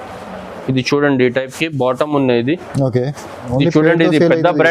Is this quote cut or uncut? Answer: cut